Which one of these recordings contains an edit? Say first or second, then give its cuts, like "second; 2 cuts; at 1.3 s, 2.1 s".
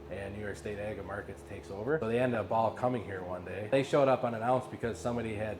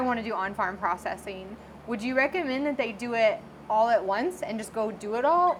first; 2 cuts; at 2.0 s, 3.7 s